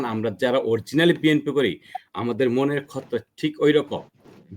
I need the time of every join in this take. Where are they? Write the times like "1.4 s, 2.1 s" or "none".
none